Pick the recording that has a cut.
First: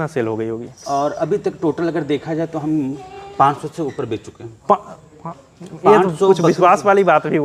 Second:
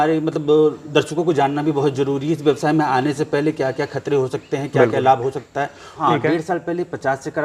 second; 1 cut; at 6.0 s

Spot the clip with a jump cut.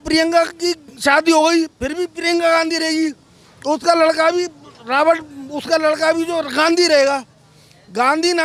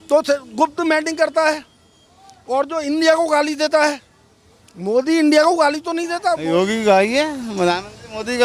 second; 1 cut; at 6.3 s

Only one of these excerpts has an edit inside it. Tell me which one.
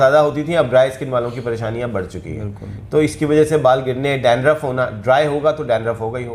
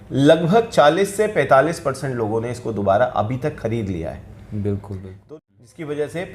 second; 1 cut; at 5.1 s

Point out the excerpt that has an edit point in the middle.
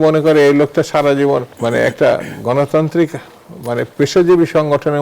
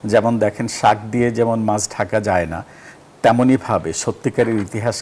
first; 1 cut; at 1.5 s

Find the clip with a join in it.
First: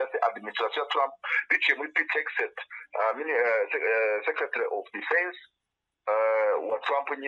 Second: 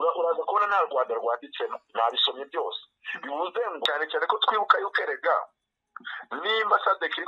second; 1 cut; at 3.8 s

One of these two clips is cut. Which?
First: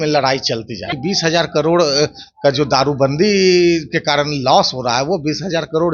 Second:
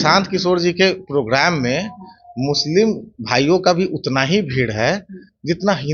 first; 1 cut; at 0.9 s

